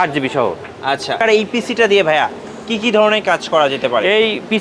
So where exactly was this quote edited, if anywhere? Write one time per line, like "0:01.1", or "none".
0:01.2